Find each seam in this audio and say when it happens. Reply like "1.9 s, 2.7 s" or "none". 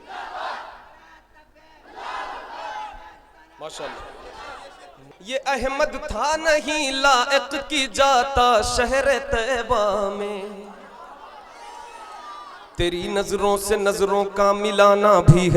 5.0 s